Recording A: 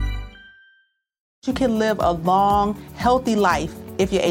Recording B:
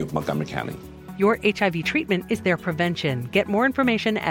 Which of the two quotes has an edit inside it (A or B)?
A